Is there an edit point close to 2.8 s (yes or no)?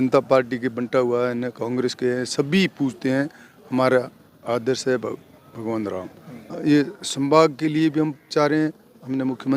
no